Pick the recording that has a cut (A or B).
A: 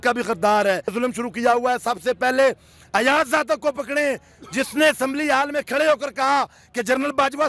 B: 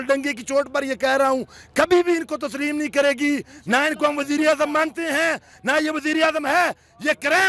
A